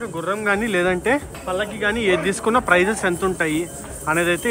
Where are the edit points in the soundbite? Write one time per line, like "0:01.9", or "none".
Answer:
none